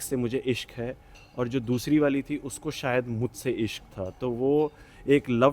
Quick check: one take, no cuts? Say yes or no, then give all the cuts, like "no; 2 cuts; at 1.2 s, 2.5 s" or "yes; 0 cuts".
yes; 0 cuts